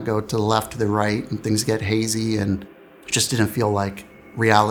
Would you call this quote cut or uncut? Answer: uncut